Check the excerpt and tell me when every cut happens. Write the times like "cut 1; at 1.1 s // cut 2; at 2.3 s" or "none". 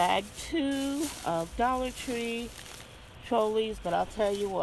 none